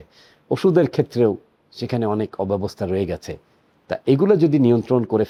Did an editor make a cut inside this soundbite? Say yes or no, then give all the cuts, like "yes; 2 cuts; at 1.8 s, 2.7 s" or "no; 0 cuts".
no; 0 cuts